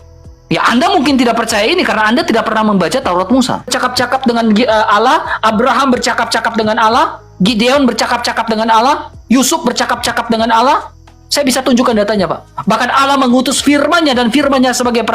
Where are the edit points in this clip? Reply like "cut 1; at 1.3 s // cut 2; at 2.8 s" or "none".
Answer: cut 1; at 3.7 s